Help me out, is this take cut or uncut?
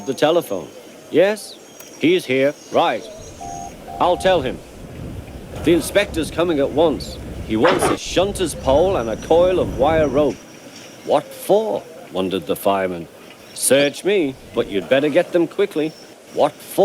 cut